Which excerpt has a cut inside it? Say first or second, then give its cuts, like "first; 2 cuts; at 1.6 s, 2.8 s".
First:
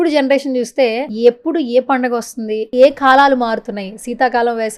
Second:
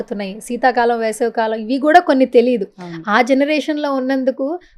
first; 2 cuts; at 1.1 s, 2.7 s